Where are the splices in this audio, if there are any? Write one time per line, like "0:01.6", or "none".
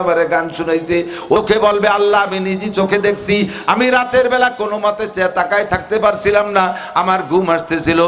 0:01.4